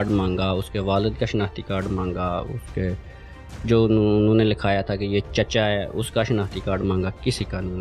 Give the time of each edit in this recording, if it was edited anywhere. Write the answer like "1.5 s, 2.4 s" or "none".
none